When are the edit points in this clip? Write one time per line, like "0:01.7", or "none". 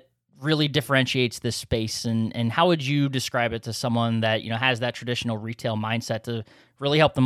none

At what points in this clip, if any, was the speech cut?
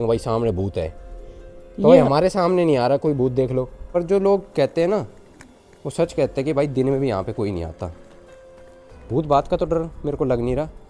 0:03.8

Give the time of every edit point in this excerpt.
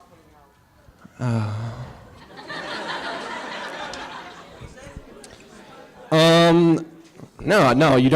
0:06.6

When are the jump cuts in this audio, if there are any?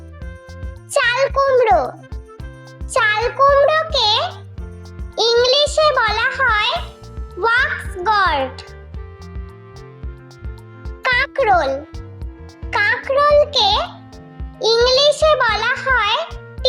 0:00.9

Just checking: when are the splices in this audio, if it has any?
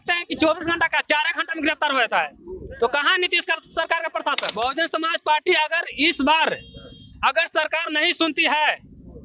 0:04.5

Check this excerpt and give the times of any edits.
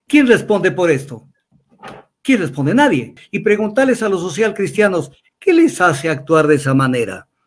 0:03.2

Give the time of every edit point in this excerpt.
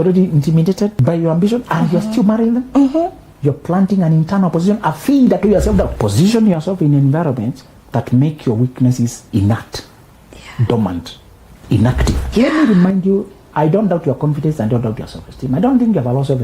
0:01.0
0:03.2
0:06.0
0:09.2
0:12.1

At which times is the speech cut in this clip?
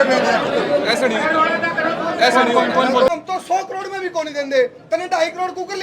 0:03.1

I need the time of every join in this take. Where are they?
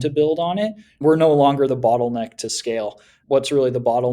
0:01.0
0:03.1

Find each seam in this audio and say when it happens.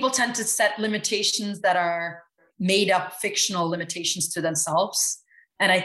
0:02.4

